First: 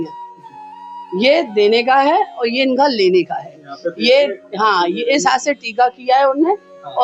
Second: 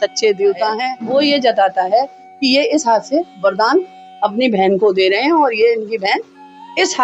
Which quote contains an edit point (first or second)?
second